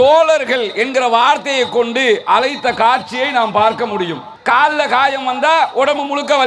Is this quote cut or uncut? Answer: cut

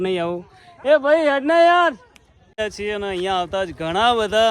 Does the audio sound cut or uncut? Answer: cut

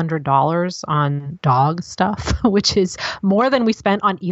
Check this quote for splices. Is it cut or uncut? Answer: cut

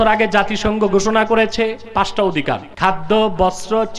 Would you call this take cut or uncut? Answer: cut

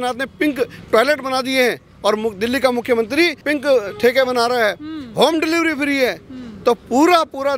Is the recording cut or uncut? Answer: cut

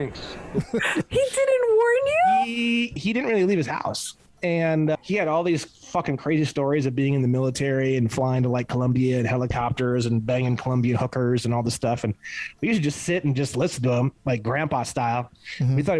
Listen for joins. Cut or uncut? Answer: cut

